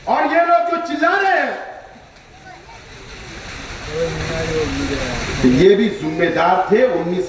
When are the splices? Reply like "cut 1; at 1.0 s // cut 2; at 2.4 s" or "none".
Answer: none

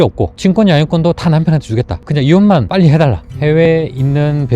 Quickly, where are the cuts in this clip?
cut 1; at 3.2 s

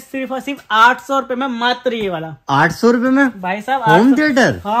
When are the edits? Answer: none

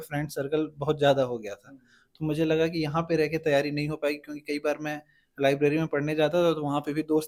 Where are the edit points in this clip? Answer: none

